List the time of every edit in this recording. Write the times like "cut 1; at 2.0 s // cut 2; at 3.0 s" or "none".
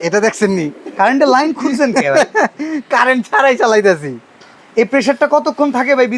cut 1; at 4.6 s